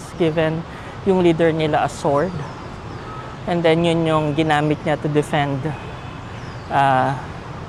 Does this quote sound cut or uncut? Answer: uncut